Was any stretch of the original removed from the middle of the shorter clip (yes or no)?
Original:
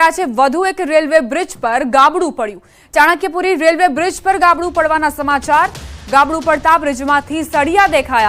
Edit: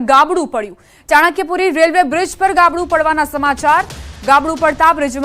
no